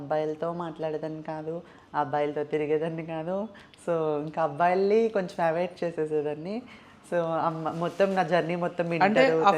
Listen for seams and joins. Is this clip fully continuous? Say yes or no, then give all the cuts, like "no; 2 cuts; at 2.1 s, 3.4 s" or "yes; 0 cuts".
yes; 0 cuts